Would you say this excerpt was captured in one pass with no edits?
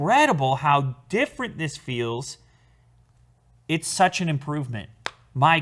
yes; 0 cuts

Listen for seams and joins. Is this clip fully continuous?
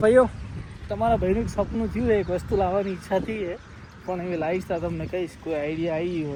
yes; 0 cuts

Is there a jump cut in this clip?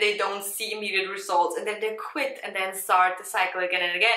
no; 0 cuts

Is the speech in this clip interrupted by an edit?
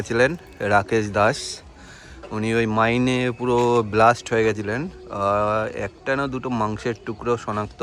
no; 0 cuts

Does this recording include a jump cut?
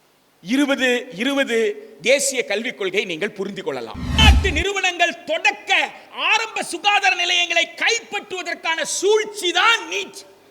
yes; 1 cut; at 4.1 s

